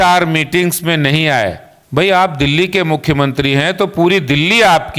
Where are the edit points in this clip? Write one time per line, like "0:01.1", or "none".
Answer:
0:01.7